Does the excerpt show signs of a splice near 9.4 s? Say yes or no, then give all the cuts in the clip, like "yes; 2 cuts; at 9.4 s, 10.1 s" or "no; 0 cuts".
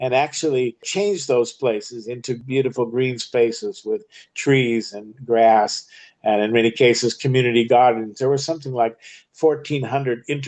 no; 3 cuts; at 0.9 s, 2.4 s, 8.1 s